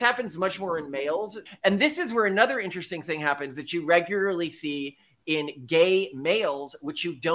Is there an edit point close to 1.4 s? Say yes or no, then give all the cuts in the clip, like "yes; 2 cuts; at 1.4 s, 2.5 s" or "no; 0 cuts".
yes; 1 cut; at 1.4 s